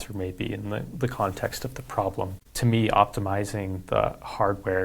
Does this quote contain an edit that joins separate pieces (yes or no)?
yes